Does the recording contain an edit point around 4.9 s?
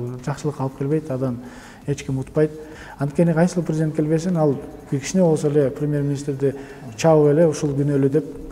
no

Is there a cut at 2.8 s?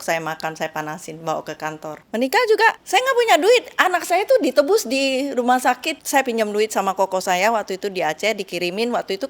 yes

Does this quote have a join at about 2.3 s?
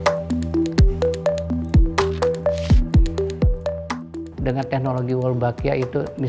no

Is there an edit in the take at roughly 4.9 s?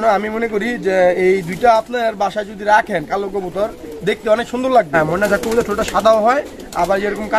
yes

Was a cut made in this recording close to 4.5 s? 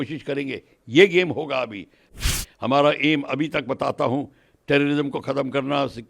no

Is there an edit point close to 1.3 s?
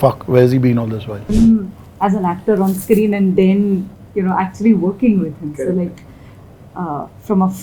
yes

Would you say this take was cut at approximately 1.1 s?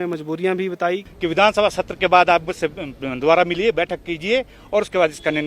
yes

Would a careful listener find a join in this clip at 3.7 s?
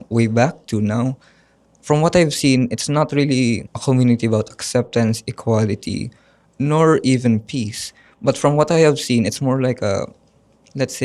yes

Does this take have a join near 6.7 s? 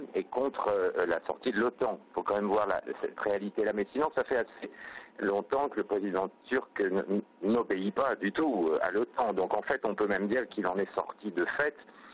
no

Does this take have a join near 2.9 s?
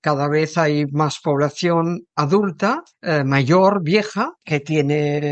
yes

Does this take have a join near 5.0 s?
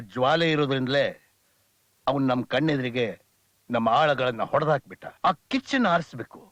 yes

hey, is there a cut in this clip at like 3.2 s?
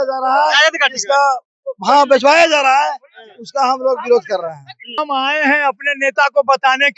no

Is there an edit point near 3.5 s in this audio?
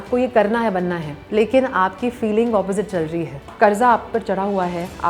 yes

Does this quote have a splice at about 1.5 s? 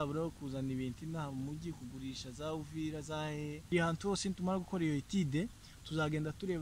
no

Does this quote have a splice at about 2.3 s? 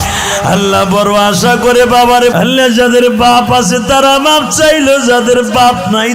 yes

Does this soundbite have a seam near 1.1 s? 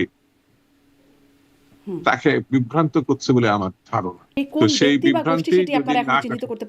no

